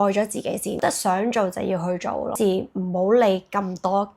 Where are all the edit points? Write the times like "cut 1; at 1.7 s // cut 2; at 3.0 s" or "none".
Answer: cut 1; at 0.8 s // cut 2; at 2.4 s